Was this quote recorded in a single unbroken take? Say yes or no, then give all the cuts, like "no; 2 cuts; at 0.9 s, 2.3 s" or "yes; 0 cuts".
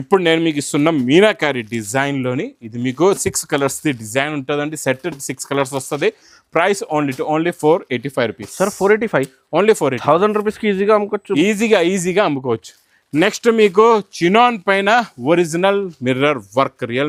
yes; 0 cuts